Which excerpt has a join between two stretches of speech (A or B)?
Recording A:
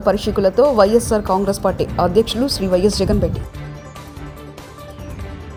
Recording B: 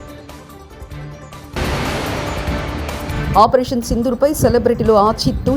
B